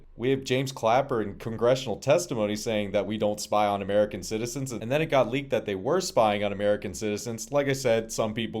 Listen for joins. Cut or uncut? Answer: cut